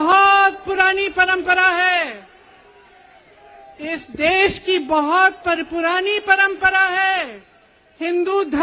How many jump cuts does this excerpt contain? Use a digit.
0